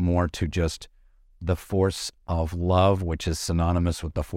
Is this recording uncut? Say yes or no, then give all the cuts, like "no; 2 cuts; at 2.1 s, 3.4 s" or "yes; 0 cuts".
yes; 0 cuts